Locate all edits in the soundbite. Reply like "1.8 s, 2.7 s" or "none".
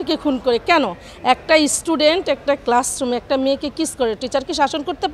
none